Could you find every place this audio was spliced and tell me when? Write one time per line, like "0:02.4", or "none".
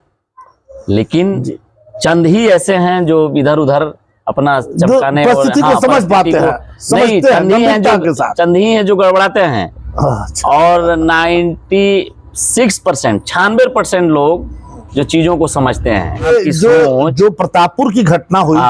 0:16.3